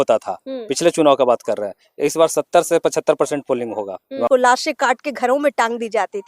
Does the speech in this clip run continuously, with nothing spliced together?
no; 1 cut; at 4.3 s

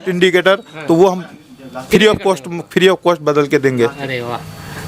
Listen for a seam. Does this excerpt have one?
no; 0 cuts

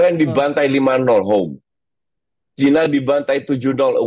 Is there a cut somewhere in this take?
no; 0 cuts

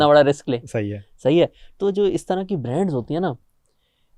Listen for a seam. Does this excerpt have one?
no; 0 cuts

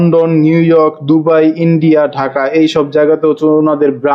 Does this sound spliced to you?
no; 0 cuts

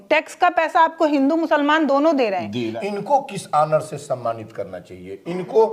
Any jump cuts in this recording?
yes; 1 cut; at 2.7 s

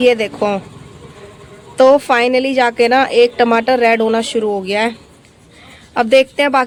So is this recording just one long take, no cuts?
yes; 0 cuts

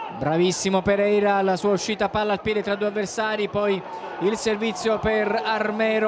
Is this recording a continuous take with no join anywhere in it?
yes; 0 cuts

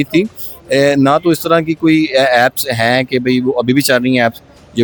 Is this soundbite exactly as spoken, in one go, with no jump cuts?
yes; 0 cuts

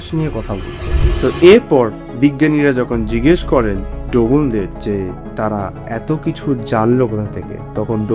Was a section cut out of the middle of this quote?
yes; 1 cut; at 1.0 s

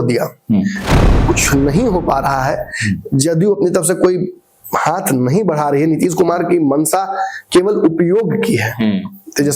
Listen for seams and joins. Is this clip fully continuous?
no; 1 cut; at 1.1 s

